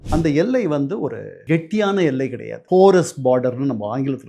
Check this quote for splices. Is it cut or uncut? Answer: cut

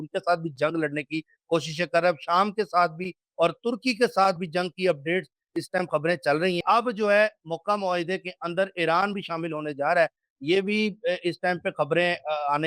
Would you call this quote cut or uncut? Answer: cut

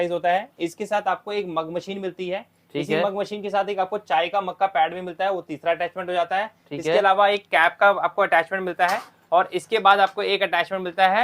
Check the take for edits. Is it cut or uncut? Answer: uncut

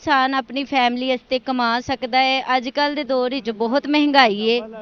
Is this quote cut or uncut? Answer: uncut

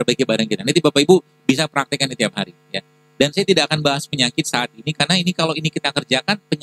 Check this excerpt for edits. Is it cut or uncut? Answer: uncut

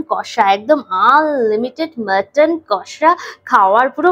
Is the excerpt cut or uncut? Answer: uncut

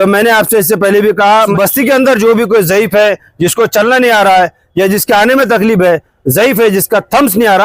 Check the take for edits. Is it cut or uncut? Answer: cut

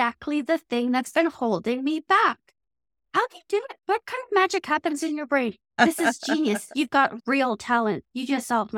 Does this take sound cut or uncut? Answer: uncut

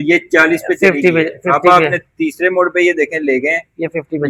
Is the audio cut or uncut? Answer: uncut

